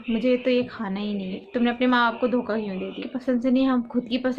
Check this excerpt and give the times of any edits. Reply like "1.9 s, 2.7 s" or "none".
1.4 s, 3.1 s